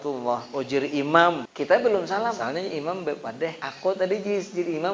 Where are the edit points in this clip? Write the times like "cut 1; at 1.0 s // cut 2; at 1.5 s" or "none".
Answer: cut 1; at 1.5 s // cut 2; at 2.4 s // cut 3; at 3.7 s